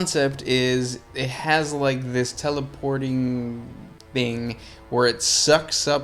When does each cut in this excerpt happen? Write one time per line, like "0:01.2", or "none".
none